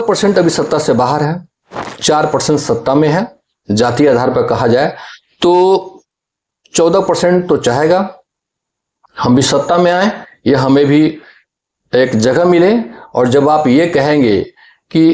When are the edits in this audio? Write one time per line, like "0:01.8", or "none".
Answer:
none

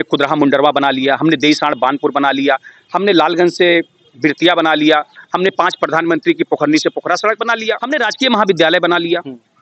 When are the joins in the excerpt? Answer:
0:07.8

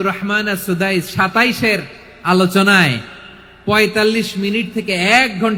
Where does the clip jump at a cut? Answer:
none

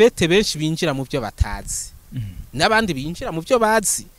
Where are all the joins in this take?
none

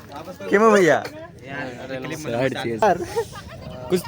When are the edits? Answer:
0:02.8

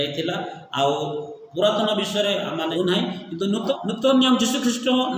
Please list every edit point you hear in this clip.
0:02.7
0:03.7

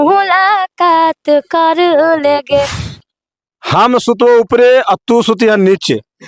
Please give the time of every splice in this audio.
0:03.0

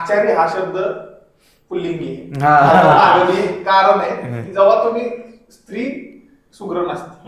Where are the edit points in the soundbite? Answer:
none

